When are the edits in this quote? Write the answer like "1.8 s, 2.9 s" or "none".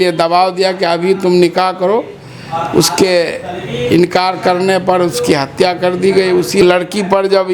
6.6 s